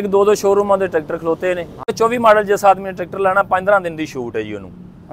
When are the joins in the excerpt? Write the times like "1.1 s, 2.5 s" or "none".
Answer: 1.9 s